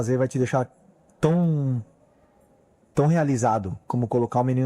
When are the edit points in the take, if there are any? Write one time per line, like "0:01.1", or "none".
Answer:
0:03.2